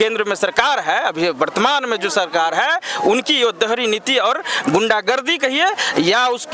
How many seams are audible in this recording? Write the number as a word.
zero